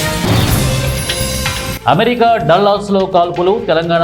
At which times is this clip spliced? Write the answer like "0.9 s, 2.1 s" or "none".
1.0 s, 1.8 s